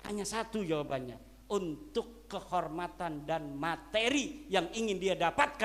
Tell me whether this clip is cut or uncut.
uncut